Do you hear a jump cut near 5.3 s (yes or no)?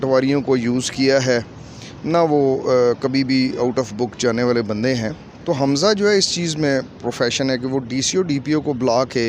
yes